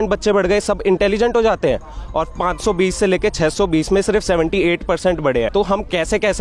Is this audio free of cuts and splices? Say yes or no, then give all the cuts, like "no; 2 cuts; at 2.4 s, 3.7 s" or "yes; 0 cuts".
no; 1 cut; at 5.5 s